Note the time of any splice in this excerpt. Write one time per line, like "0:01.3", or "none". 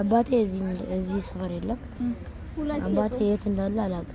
none